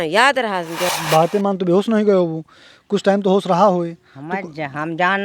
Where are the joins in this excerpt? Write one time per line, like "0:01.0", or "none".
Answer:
0:00.9